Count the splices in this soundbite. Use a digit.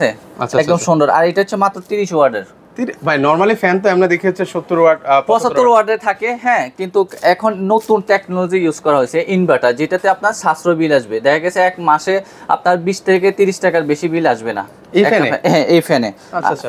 0